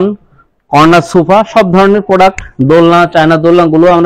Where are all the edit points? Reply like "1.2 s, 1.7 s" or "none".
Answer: none

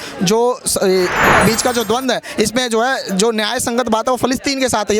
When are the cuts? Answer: 1.1 s

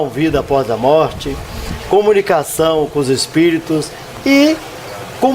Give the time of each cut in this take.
2.5 s

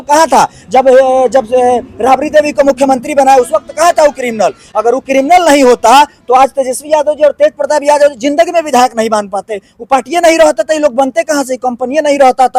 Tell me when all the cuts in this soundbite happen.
none

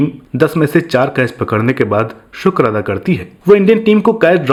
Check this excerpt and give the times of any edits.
none

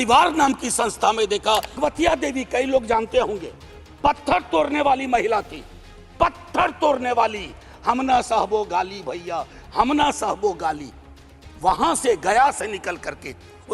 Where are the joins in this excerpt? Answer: 1.8 s

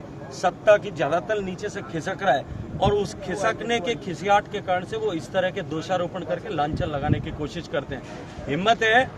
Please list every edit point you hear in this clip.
none

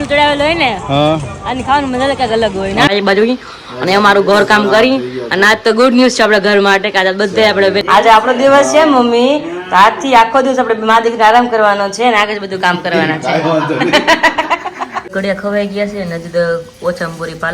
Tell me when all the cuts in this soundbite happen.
2.9 s, 7.8 s, 15.1 s

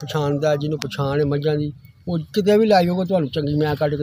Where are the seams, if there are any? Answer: none

